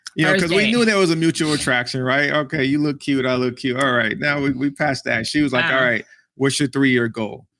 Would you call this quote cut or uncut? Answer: uncut